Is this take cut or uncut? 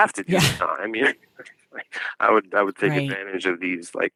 uncut